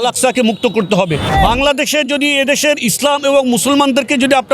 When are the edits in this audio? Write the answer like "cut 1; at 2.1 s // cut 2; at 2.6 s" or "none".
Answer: cut 1; at 1.4 s